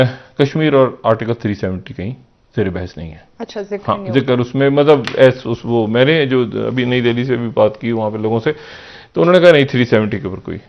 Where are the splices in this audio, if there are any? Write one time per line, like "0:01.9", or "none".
none